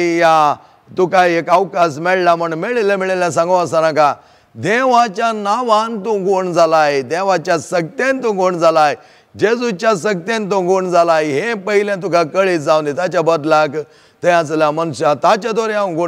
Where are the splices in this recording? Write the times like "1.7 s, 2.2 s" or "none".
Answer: none